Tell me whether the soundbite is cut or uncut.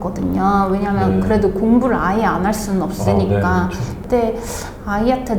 cut